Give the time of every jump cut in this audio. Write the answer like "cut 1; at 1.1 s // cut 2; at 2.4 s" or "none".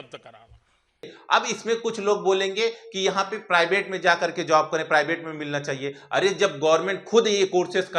cut 1; at 1.2 s

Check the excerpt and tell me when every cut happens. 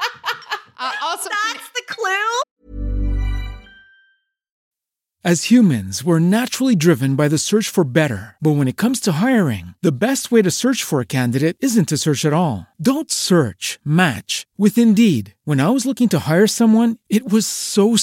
cut 1; at 2.5 s

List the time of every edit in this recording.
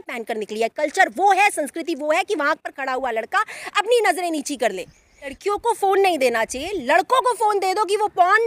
cut 1; at 5.4 s

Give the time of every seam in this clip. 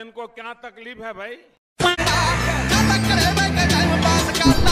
cut 1; at 2.0 s

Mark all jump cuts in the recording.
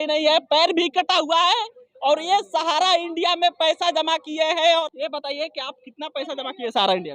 cut 1; at 4.9 s

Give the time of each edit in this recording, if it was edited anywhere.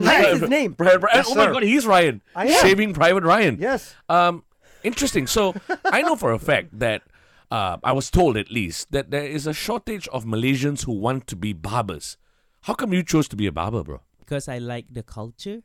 cut 1; at 14.2 s

